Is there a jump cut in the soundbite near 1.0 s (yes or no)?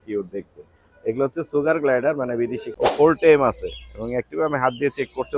no